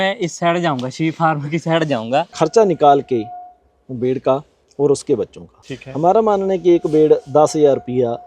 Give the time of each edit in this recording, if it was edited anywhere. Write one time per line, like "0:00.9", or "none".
0:02.3